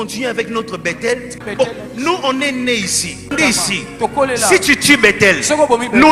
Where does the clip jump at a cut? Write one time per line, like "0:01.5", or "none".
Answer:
0:01.4
0:03.3